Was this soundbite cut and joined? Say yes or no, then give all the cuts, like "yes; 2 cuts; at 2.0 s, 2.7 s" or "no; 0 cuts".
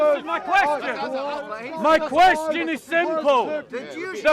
yes; 1 cut; at 1.2 s